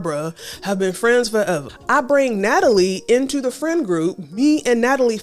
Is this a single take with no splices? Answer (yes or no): no